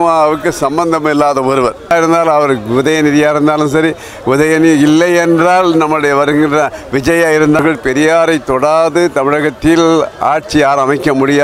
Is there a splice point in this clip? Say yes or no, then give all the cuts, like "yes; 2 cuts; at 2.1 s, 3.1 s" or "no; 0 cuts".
yes; 2 cuts; at 1.9 s, 7.6 s